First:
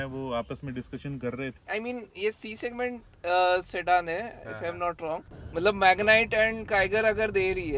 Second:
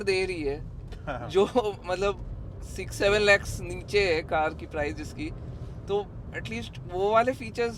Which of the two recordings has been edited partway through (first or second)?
first